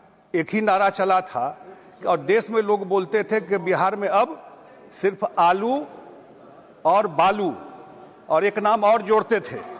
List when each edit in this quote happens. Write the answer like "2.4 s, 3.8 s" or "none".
none